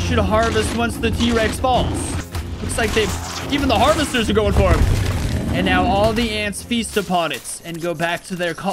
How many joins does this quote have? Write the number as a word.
one